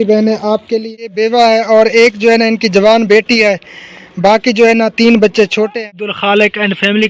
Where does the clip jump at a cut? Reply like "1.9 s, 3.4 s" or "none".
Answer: 0.9 s, 6.2 s